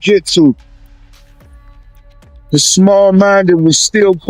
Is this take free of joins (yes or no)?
yes